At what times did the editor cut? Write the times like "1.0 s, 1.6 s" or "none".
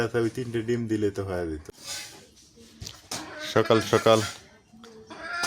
1.7 s